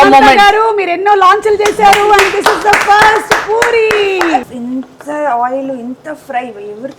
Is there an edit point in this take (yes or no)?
yes